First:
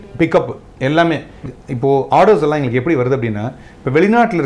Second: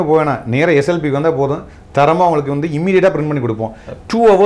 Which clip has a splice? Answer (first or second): first